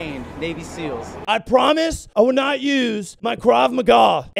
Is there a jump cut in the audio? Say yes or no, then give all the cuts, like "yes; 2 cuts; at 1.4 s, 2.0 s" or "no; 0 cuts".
yes; 1 cut; at 1.2 s